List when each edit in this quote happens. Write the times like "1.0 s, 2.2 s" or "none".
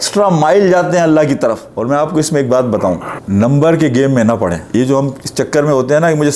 1.6 s, 3.1 s, 4.6 s